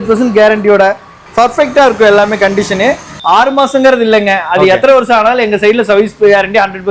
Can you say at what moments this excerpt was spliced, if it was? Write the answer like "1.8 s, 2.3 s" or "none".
3.2 s